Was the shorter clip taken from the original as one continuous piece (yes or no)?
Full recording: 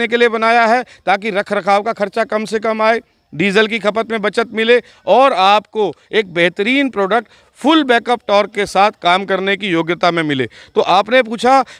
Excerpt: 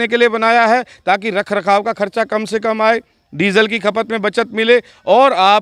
yes